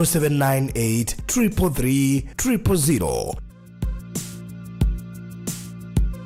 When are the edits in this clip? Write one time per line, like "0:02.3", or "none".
none